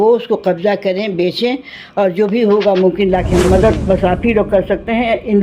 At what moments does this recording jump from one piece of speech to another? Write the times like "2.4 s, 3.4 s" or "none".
3.5 s